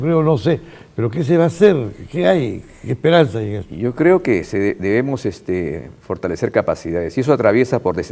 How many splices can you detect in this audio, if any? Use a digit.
1